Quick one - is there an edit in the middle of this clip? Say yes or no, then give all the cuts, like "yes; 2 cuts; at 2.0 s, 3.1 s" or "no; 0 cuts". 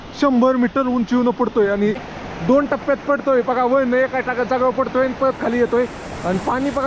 yes; 1 cut; at 2.0 s